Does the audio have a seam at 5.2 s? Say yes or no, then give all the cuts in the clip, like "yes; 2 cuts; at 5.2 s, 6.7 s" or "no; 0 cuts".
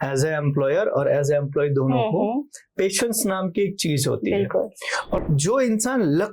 yes; 1 cut; at 5.2 s